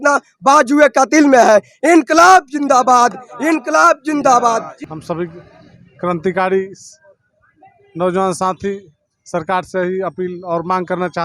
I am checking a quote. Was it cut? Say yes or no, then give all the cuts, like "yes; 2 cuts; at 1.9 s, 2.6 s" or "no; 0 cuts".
yes; 1 cut; at 4.9 s